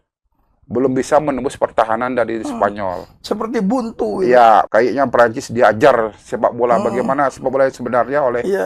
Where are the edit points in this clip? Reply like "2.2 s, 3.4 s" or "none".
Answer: 4.7 s